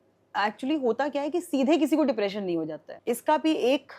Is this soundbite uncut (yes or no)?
no